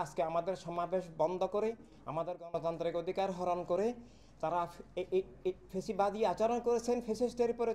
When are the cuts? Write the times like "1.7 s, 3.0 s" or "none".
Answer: none

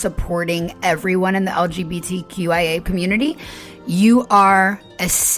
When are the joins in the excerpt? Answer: 2.8 s

